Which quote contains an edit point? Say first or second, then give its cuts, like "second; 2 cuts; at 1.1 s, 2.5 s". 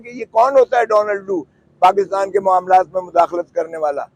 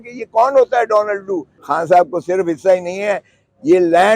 second; 1 cut; at 1.5 s